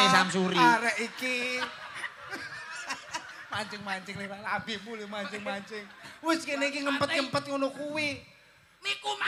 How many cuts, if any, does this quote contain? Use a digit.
0